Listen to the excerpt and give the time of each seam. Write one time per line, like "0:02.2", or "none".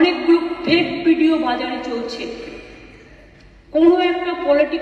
none